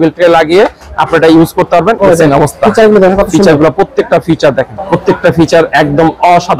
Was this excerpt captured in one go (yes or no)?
no